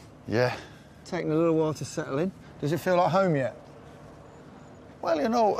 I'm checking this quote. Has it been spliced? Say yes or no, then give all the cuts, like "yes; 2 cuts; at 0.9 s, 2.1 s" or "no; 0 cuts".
yes; 1 cut; at 2.8 s